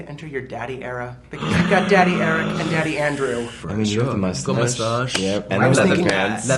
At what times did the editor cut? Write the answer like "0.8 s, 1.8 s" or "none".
3.6 s